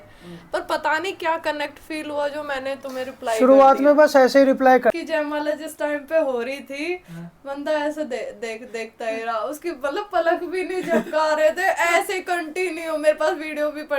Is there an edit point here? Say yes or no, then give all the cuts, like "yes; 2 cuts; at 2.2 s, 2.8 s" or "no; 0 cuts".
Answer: yes; 1 cut; at 4.9 s